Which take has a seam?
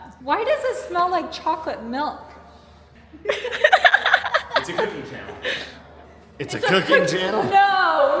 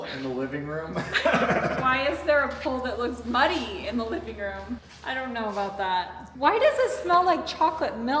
second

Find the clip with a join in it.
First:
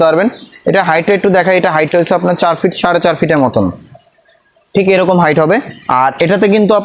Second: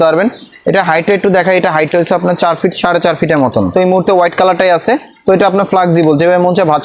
second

